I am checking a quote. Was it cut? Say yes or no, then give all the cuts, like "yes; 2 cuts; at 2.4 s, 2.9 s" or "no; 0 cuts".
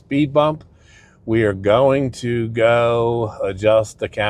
no; 0 cuts